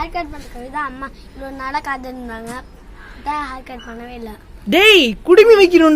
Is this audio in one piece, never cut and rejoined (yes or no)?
yes